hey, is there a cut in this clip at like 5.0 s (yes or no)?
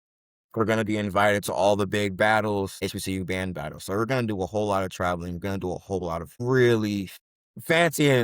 no